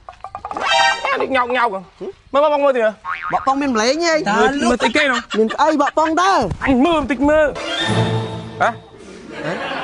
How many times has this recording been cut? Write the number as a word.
zero